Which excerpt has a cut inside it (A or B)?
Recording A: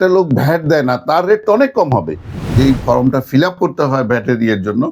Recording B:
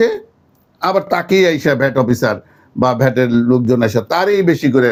A